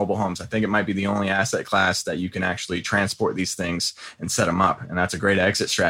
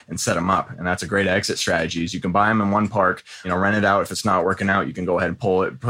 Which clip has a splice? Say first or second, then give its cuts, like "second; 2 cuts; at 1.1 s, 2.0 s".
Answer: second; 1 cut; at 3.4 s